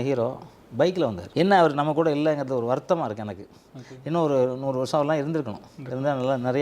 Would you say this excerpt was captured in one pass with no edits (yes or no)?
no